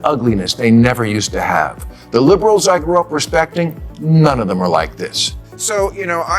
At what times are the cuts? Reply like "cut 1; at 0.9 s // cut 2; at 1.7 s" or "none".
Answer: cut 1; at 5.4 s